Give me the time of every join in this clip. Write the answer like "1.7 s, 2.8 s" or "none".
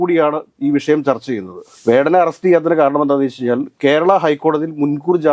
1.6 s